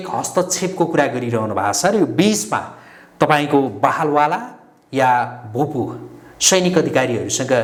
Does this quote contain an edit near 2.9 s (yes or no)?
no